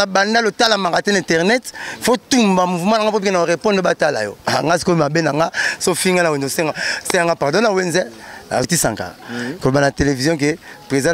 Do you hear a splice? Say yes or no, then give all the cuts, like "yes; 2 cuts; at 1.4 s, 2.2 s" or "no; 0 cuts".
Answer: yes; 1 cut; at 8.7 s